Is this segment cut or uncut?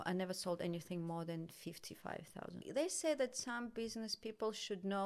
cut